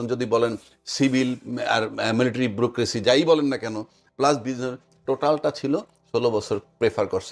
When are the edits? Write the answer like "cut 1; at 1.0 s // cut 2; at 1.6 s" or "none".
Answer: none